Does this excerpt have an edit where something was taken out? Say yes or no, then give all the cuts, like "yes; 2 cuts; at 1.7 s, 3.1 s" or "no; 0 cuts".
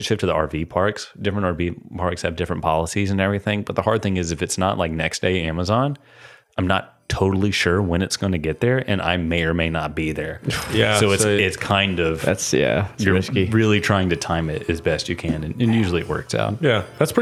no; 0 cuts